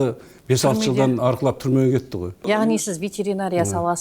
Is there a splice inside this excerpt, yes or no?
yes